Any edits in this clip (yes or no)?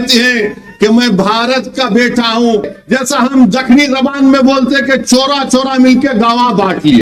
yes